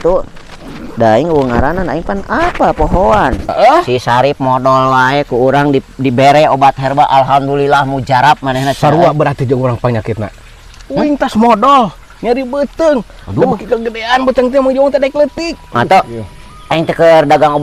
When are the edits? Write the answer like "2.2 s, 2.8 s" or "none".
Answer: 3.5 s, 15.8 s